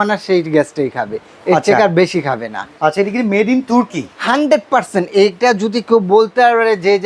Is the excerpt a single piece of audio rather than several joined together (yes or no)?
no